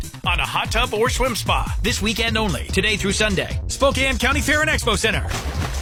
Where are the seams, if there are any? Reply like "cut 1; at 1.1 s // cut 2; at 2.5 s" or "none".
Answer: none